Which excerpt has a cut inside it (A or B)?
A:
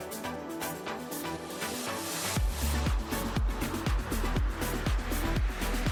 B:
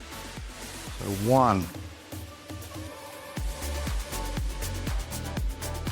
B